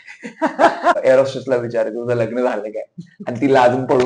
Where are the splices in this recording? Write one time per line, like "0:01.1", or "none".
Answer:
0:01.0